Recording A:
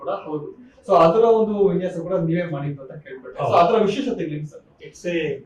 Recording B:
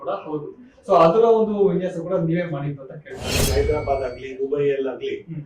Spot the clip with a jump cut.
B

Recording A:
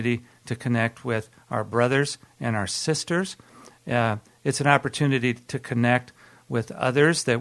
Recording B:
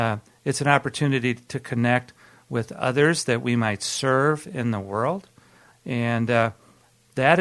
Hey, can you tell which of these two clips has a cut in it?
B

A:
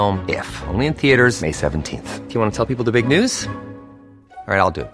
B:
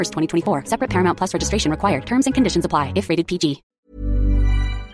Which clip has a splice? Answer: B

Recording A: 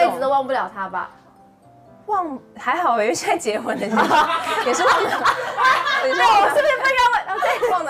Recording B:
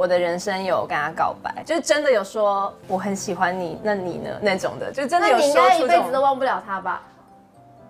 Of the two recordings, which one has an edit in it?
B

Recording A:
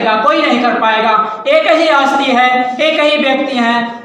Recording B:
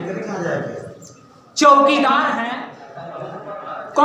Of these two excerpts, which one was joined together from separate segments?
B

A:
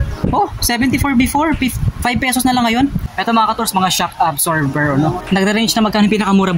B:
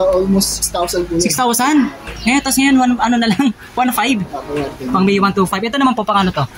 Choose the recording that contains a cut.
A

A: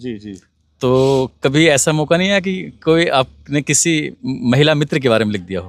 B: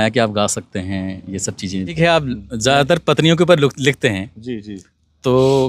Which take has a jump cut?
B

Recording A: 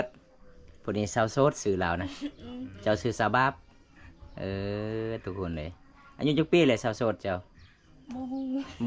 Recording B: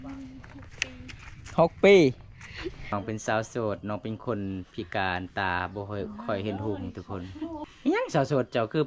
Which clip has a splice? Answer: B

